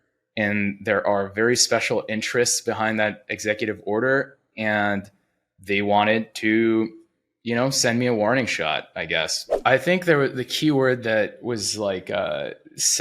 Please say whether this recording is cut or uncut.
cut